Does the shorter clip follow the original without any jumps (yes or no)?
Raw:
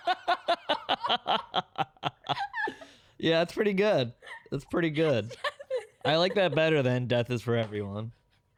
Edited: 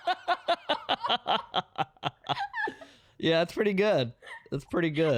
yes